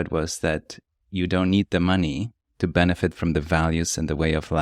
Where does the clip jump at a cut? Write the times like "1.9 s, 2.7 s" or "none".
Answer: none